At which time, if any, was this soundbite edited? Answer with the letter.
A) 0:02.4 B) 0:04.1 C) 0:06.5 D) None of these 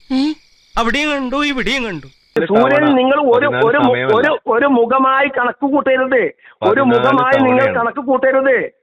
A